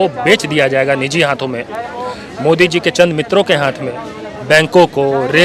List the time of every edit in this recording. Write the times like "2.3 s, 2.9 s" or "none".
none